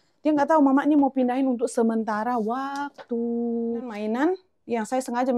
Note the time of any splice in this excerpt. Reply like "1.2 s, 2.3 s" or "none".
3.9 s